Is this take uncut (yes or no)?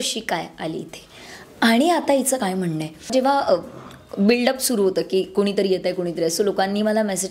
no